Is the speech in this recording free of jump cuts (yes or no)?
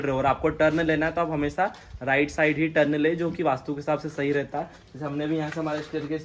yes